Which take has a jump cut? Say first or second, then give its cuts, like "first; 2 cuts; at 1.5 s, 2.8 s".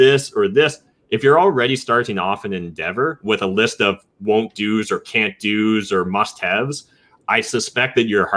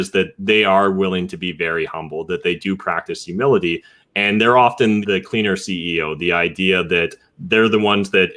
second; 1 cut; at 5.0 s